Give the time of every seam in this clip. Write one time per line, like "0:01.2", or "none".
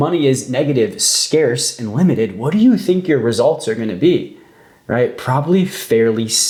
none